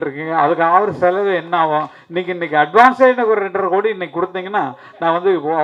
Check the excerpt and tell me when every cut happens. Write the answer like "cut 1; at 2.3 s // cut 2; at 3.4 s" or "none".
none

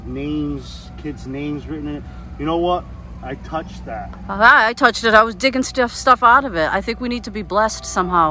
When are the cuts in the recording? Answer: none

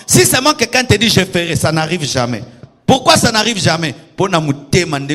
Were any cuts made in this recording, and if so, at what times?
none

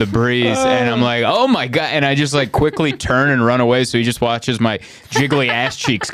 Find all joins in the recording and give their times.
none

